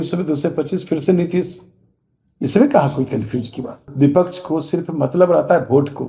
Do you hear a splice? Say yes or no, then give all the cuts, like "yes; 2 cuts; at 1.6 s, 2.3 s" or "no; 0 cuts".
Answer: yes; 1 cut; at 3.9 s